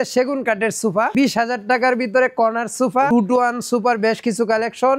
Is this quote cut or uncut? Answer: cut